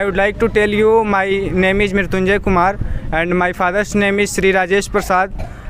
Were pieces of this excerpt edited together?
no; 0 cuts

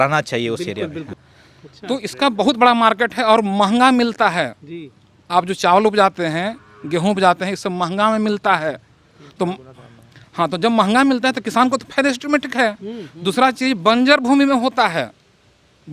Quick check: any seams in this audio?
yes; 1 cut; at 1.2 s

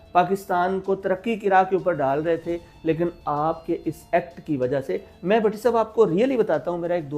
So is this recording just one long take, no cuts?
yes; 0 cuts

